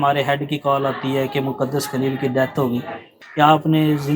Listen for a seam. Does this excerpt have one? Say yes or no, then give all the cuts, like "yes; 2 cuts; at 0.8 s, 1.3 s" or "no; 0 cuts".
yes; 1 cut; at 3.1 s